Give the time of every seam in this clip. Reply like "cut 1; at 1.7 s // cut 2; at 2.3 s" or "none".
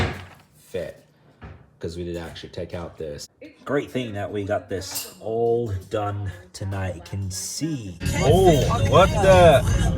cut 1; at 3.2 s // cut 2; at 7.9 s